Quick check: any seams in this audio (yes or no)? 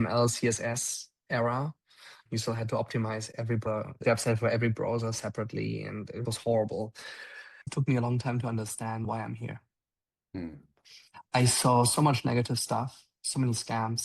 yes